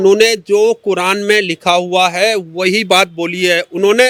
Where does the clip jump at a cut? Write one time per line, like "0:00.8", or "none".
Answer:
none